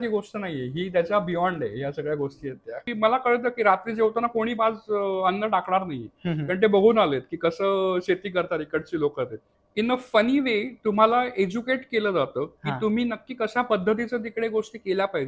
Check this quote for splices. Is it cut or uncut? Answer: cut